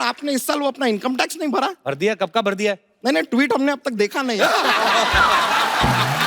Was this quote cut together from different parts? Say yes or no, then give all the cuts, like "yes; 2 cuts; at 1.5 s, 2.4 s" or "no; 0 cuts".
yes; 1 cut; at 1.8 s